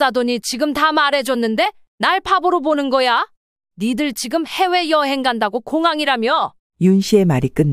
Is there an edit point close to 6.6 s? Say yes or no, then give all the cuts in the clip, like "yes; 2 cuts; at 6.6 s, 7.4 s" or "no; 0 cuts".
no; 0 cuts